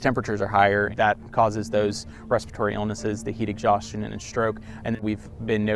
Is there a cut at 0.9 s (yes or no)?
yes